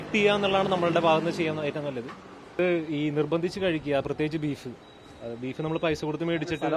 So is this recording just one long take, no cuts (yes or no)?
no